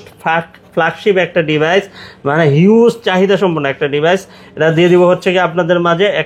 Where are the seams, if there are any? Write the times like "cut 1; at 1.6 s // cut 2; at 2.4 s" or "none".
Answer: none